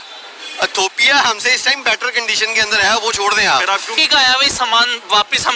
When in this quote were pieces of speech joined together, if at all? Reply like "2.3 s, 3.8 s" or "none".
4.0 s